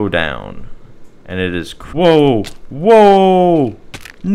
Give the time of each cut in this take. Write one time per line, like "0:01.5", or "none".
0:01.8